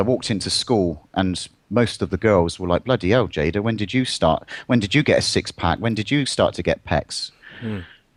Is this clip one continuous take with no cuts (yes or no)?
yes